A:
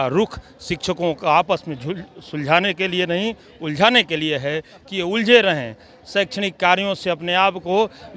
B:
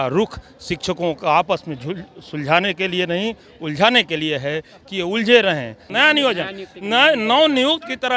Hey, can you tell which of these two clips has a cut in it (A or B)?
B